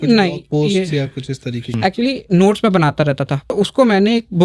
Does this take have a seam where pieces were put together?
yes; 2 cuts; at 1.7 s, 3.5 s

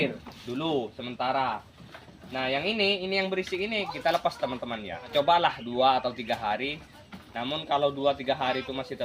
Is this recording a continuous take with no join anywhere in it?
no; 1 cut; at 5.1 s

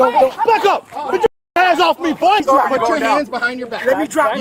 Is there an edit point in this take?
yes; 1 cut; at 2.4 s

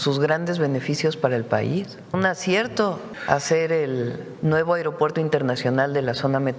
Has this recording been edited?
yes; 3 cuts; at 2.1 s, 3.1 s, 4.2 s

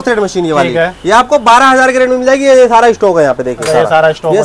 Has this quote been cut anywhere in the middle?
no; 0 cuts

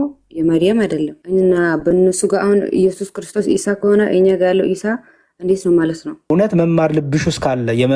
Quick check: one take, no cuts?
no; 2 cuts; at 1.2 s, 6.3 s

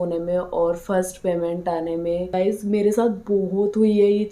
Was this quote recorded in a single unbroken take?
no; 1 cut; at 2.3 s

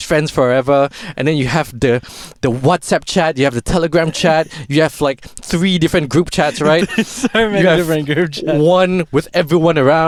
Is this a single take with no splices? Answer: yes; 0 cuts

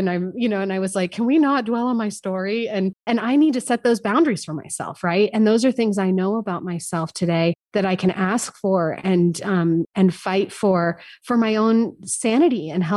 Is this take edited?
yes; 2 cuts; at 3.0 s, 9.9 s

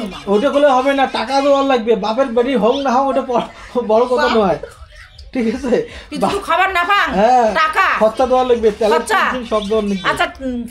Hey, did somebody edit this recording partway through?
no; 0 cuts

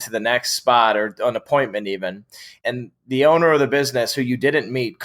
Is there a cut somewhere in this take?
yes; 1 cut; at 2.5 s

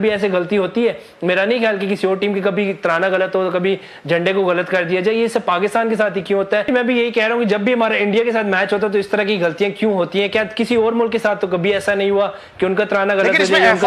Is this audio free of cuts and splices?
no; 1 cut; at 6.7 s

